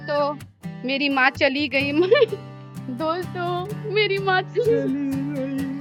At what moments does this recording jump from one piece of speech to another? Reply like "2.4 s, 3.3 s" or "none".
none